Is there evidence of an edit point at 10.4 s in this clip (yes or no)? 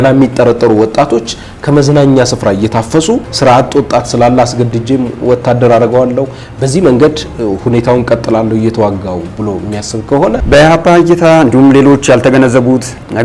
yes